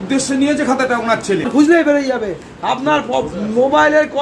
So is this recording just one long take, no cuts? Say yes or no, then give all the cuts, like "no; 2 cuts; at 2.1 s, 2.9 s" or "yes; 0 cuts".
no; 1 cut; at 1.4 s